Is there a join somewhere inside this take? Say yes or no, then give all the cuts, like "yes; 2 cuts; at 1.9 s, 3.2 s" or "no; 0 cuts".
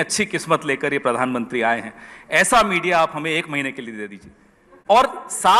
no; 0 cuts